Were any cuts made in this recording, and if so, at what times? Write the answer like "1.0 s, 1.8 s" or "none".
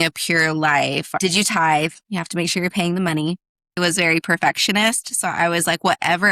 1.2 s, 3.8 s